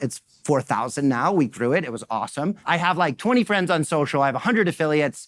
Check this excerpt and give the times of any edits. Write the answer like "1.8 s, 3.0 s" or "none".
2.6 s